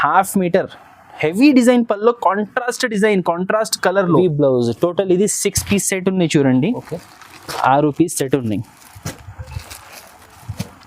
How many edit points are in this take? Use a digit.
1